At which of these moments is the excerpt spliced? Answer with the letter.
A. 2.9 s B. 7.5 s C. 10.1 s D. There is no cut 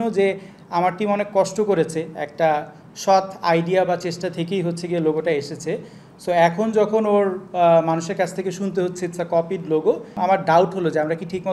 C